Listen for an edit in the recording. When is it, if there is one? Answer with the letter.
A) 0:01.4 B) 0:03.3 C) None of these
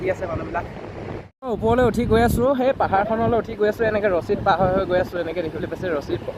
A